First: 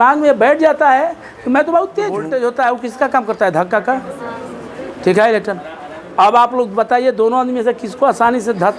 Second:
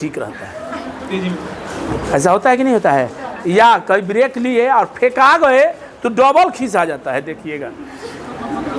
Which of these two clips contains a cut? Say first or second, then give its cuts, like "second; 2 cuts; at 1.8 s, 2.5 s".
first; 1 cut; at 2.2 s